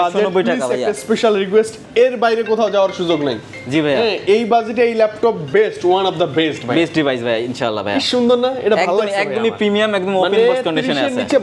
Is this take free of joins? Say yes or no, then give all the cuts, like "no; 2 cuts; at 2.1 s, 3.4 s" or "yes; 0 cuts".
yes; 0 cuts